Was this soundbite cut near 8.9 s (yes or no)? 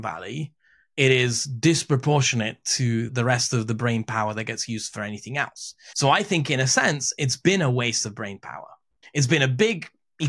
yes